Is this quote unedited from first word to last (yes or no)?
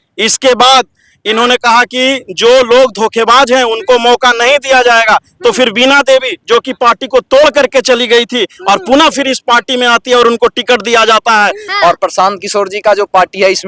no